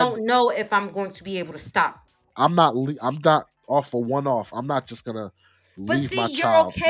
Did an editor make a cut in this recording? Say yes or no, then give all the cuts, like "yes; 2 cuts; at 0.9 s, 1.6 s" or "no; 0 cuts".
yes; 1 cut; at 2.3 s